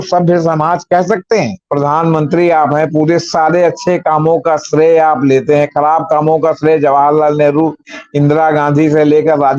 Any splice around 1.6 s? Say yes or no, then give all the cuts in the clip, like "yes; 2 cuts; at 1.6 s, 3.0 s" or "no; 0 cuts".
yes; 1 cut; at 1.6 s